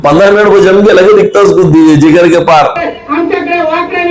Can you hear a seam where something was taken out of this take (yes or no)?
yes